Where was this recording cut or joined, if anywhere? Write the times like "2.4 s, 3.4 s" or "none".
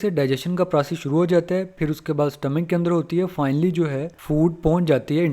4.1 s